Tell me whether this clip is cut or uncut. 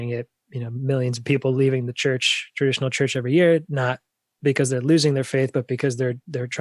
uncut